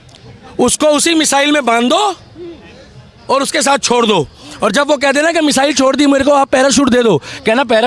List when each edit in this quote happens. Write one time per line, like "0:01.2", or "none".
none